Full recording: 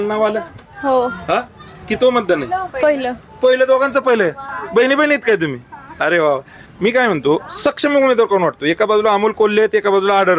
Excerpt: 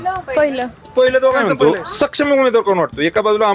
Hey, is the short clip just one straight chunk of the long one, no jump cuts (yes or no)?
no